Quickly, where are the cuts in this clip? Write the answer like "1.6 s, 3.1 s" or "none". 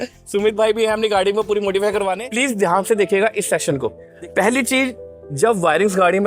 2.2 s, 4.1 s